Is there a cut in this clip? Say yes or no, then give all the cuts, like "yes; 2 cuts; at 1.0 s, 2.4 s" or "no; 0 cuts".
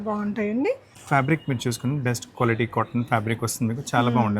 yes; 1 cut; at 1.0 s